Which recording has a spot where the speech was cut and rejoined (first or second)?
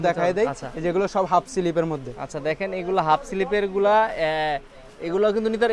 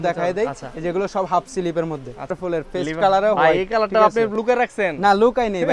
second